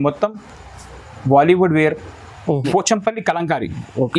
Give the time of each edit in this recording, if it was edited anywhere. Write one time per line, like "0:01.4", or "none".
0:02.5